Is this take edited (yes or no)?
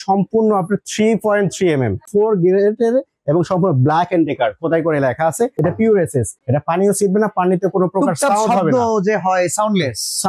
yes